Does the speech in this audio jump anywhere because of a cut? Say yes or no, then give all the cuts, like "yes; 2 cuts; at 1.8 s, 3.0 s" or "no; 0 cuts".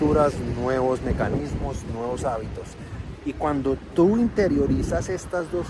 no; 0 cuts